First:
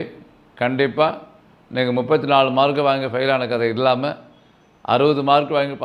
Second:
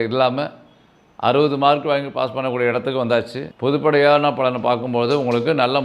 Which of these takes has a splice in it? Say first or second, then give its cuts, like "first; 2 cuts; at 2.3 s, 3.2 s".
second; 1 cut; at 3.4 s